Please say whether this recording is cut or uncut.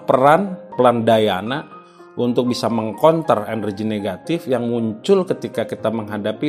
uncut